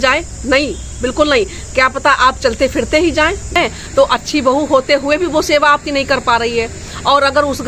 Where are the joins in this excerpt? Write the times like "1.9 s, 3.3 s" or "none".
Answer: 3.5 s